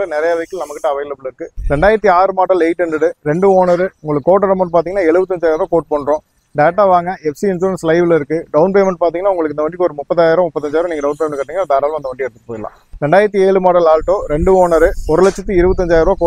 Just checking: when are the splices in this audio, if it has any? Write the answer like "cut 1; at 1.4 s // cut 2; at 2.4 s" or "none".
cut 1; at 1.6 s